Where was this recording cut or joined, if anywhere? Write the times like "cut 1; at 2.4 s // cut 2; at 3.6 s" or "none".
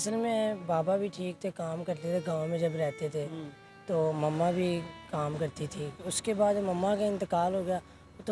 cut 1; at 6.0 s